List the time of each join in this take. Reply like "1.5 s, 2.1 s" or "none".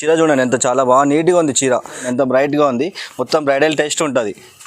2.1 s